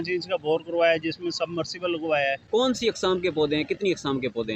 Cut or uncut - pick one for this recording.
cut